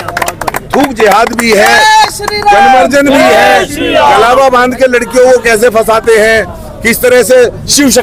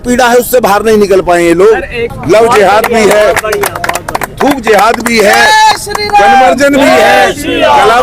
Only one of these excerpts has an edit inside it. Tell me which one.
second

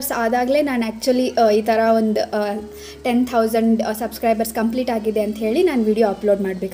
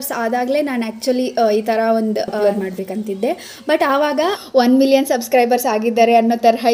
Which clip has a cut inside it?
second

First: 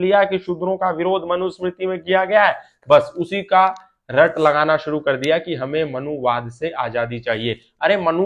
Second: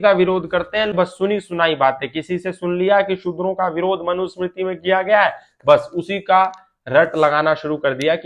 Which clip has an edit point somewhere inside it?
second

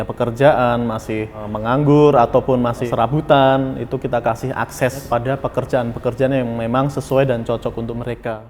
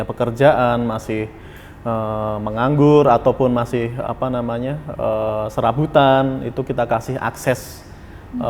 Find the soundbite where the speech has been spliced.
first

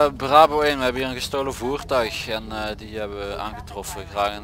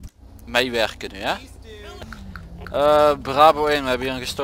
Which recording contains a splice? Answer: second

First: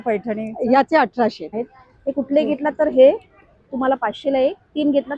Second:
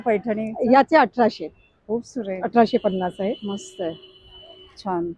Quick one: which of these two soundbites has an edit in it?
first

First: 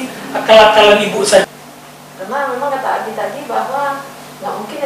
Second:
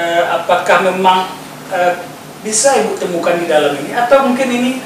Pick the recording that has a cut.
first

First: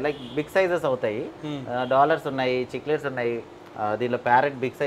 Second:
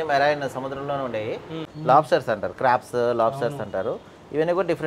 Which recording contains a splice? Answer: second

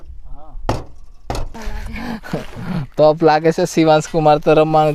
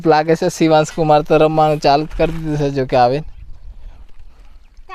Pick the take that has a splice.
first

